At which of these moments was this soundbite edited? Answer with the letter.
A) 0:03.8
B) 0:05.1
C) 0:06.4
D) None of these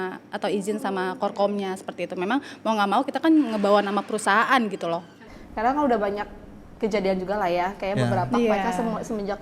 B